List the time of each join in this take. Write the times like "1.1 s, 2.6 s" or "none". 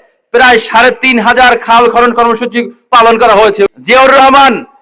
3.7 s